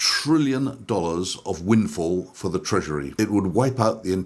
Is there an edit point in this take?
yes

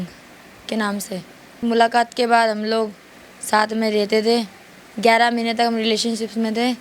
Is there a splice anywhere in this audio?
yes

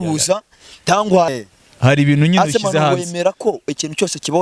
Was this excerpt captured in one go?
no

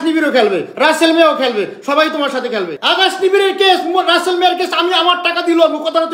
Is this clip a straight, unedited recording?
no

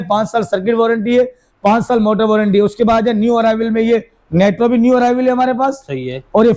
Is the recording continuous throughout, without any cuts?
yes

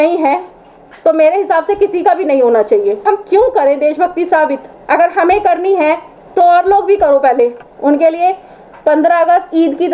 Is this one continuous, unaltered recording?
no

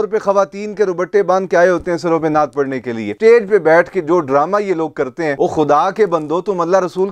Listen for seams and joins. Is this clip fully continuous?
no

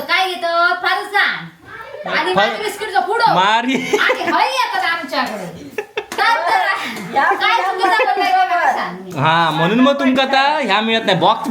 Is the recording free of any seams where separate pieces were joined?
yes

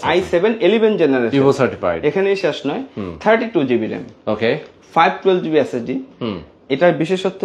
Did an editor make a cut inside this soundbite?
no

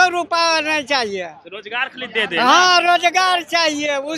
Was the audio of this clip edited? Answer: no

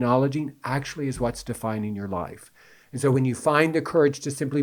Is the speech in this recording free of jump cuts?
yes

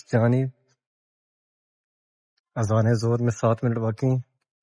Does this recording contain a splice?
no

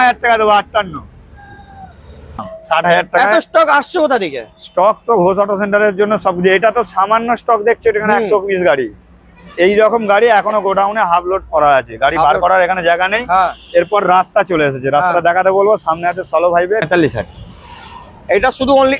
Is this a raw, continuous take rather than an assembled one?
no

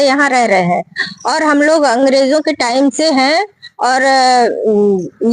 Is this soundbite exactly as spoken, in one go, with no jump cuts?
yes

